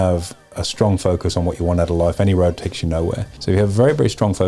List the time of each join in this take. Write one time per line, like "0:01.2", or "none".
0:03.3